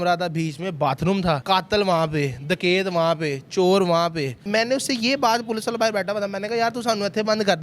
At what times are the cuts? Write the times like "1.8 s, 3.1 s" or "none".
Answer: 1.4 s, 4.4 s